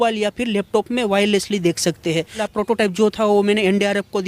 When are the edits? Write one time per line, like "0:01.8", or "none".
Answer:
0:02.4